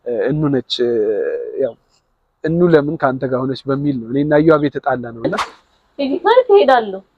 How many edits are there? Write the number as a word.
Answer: one